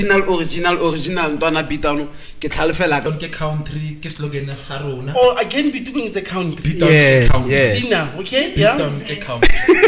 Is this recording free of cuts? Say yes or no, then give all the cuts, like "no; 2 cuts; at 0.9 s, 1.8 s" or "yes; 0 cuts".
no; 1 cut; at 3.1 s